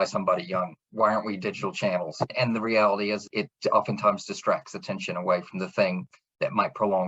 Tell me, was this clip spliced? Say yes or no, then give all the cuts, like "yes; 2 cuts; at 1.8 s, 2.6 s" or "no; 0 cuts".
yes; 2 cuts; at 2.3 s, 3.3 s